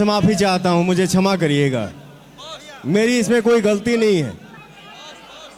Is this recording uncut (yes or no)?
yes